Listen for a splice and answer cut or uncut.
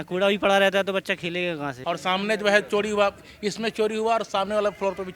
cut